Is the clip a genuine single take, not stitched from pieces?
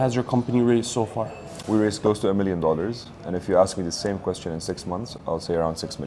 yes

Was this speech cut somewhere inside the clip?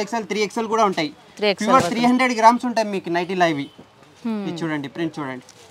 no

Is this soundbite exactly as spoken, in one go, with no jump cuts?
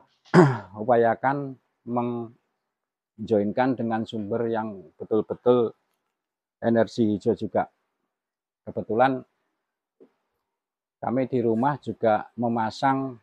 yes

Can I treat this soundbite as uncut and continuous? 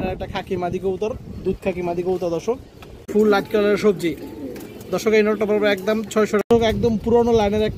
no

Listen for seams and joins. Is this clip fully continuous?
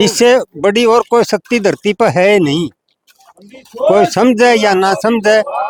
yes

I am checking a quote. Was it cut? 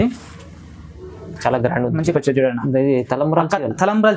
yes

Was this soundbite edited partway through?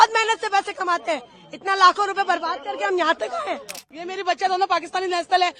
yes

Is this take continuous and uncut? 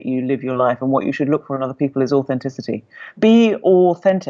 no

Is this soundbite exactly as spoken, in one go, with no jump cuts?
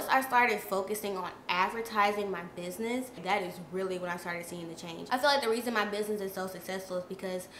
no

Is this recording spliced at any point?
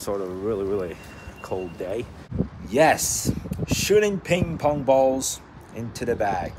yes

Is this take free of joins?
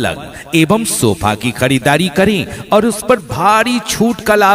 yes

